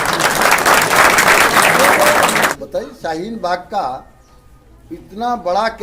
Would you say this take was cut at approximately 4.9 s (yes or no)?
no